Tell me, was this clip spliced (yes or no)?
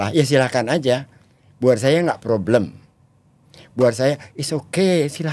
no